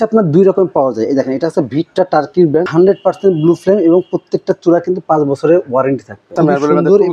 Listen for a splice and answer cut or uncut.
cut